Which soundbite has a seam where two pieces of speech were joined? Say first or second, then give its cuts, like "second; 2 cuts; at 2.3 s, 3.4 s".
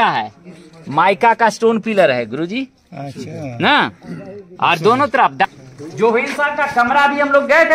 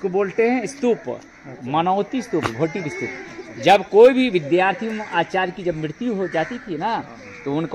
first; 1 cut; at 5.4 s